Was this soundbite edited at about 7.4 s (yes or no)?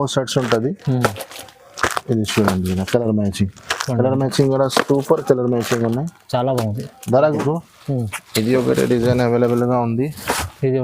yes